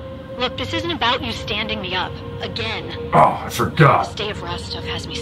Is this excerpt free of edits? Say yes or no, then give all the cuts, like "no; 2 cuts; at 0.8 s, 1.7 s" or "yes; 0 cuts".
yes; 0 cuts